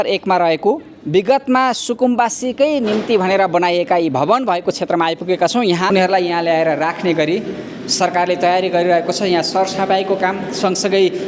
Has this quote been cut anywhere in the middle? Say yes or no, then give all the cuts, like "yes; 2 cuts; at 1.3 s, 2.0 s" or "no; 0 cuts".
yes; 1 cut; at 5.9 s